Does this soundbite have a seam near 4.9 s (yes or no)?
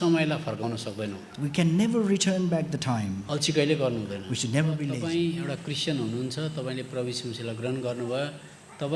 yes